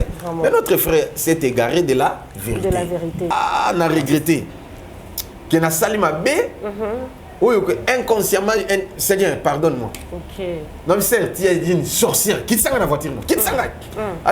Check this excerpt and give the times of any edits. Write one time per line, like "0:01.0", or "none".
0:03.3